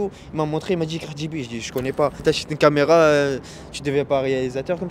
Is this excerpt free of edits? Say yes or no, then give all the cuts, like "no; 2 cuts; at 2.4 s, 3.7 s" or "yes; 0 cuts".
no; 1 cut; at 2.2 s